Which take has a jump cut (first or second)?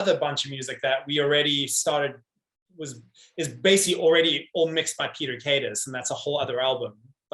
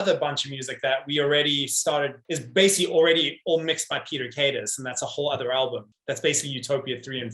second